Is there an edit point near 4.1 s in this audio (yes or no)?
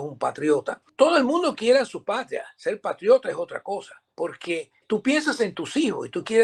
no